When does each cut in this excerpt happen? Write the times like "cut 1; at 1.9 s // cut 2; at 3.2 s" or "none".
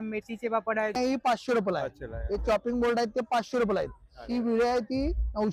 cut 1; at 1.0 s